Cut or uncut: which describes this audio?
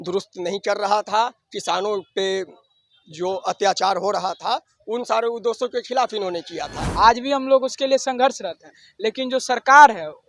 cut